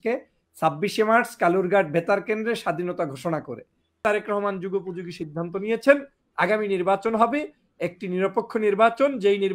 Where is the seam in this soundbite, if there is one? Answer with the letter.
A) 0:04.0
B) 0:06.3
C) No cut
A